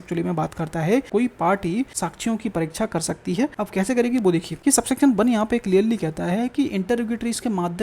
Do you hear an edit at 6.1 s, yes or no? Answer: no